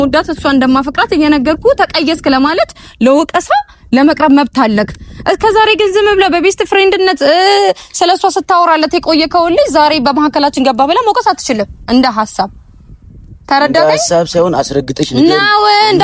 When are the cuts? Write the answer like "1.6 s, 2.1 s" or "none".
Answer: none